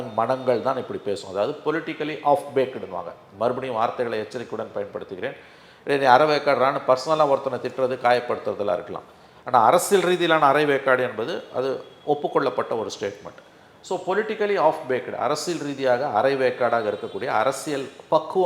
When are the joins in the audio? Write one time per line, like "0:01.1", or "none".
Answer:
none